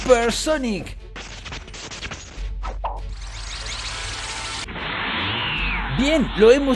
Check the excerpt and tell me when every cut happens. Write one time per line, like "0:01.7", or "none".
0:04.6